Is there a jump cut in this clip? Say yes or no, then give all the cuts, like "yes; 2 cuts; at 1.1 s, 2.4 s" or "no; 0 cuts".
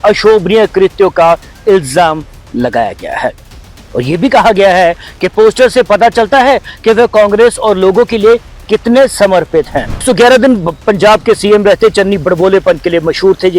yes; 1 cut; at 10.0 s